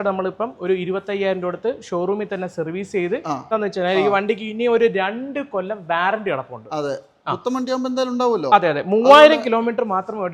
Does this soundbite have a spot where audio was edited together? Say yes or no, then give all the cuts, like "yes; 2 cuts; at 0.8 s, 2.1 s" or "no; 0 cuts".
yes; 1 cut; at 3.5 s